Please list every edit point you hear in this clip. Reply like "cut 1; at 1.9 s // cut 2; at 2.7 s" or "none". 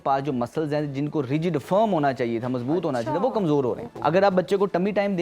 cut 1; at 3.9 s

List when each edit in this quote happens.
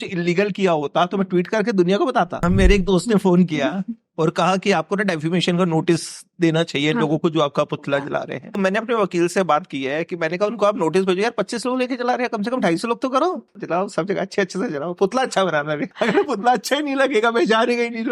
cut 1; at 2.3 s // cut 2; at 8.6 s // cut 3; at 13.6 s // cut 4; at 15.9 s

